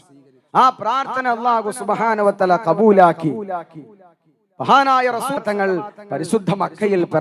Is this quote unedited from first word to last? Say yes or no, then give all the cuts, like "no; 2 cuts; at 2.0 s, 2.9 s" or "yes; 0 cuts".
no; 1 cut; at 5.4 s